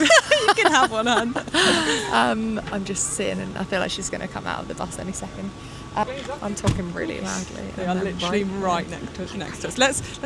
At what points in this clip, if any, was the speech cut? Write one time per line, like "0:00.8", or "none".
0:06.0